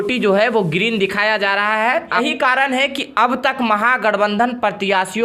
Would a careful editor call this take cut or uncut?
cut